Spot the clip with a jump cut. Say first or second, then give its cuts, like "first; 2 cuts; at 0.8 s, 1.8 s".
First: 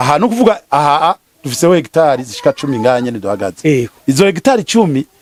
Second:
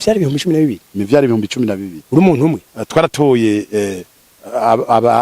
second; 1 cut; at 2.7 s